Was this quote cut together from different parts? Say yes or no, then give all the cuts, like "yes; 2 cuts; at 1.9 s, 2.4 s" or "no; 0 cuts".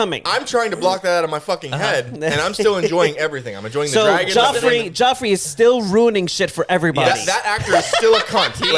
no; 0 cuts